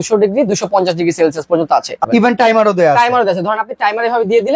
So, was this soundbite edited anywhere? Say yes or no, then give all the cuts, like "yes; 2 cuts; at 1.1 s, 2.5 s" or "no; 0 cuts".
yes; 1 cut; at 2.0 s